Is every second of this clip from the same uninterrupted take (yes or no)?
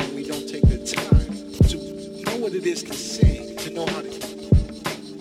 yes